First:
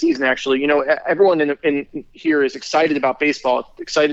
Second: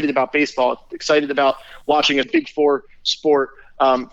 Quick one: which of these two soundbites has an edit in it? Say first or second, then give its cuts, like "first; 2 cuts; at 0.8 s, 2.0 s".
second; 1 cut; at 2.3 s